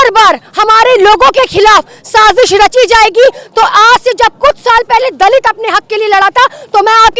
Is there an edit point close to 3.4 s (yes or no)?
no